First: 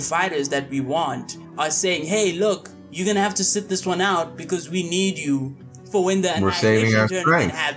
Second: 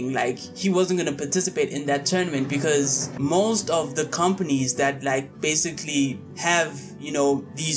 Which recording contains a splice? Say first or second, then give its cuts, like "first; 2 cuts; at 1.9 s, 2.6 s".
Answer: second; 1 cut; at 3.0 s